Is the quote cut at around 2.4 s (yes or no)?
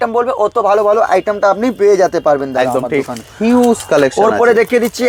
no